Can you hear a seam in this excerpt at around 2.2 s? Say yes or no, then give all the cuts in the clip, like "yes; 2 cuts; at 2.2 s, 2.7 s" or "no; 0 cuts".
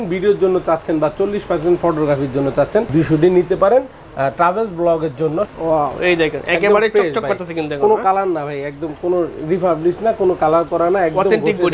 no; 1 cut; at 5.5 s